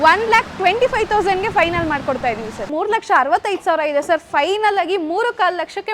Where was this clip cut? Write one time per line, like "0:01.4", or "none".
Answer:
0:02.7